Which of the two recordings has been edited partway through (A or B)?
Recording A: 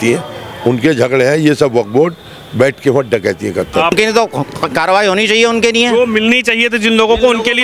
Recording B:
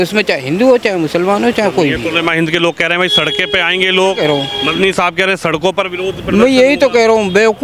A